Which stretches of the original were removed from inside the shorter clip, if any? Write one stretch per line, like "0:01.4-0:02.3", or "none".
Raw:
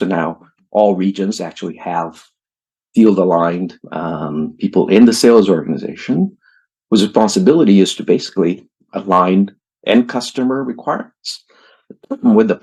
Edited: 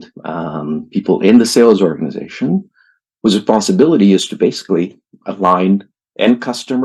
none